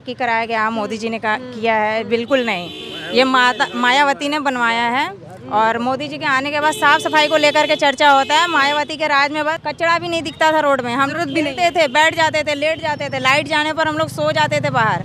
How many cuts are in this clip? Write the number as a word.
one